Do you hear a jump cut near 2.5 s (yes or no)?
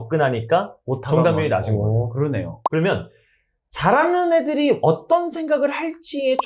yes